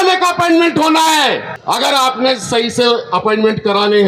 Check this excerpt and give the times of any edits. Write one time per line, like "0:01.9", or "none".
0:01.5